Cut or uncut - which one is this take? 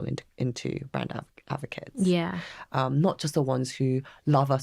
uncut